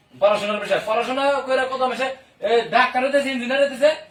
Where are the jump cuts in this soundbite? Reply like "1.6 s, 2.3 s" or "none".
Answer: none